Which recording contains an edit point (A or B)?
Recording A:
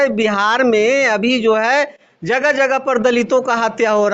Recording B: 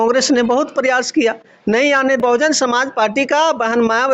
B